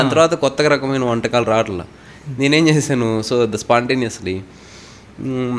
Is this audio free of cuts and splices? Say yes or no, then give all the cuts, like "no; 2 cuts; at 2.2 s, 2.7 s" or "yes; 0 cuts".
yes; 0 cuts